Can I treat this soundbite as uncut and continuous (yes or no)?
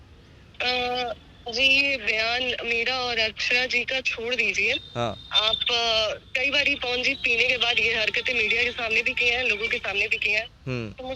yes